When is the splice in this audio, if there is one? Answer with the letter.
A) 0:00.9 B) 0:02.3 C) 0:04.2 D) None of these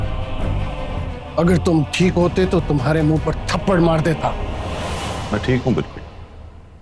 A